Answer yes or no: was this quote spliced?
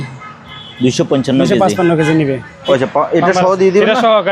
yes